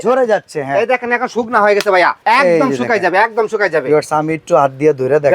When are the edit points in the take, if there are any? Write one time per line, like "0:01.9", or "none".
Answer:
0:02.2